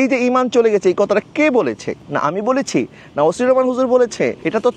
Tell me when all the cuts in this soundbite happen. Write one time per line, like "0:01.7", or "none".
0:01.9